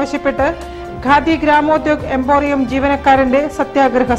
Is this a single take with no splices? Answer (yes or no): yes